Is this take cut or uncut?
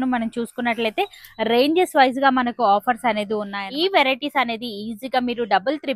cut